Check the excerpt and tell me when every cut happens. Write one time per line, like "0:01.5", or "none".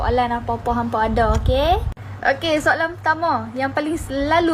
none